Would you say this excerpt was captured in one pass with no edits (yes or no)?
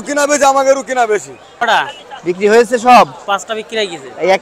no